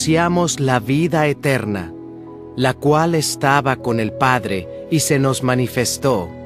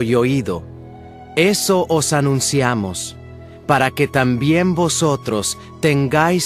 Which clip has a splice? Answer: second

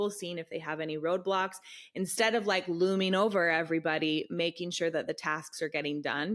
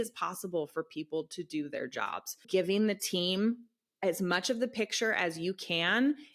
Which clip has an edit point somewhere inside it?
second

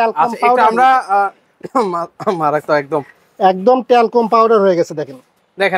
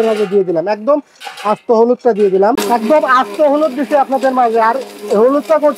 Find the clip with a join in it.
second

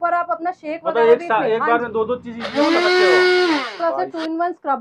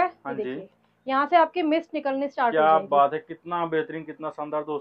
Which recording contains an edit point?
first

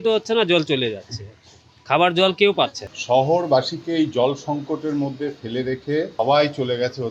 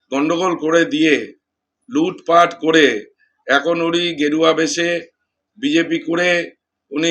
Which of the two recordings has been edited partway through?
first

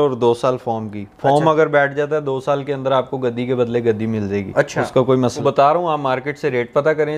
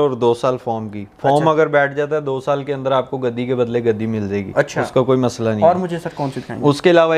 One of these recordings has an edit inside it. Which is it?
first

